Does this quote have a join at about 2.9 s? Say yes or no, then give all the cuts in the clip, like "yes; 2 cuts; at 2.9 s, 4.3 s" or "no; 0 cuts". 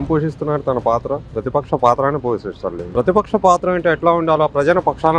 yes; 1 cut; at 2.9 s